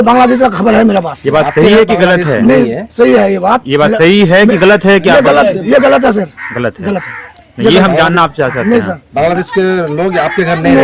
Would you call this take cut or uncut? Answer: uncut